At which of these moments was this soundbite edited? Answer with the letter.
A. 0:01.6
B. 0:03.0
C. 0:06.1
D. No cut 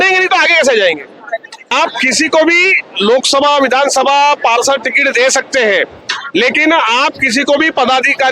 A